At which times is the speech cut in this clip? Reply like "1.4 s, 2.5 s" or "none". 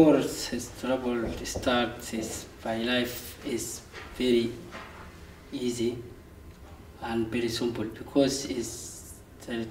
2.5 s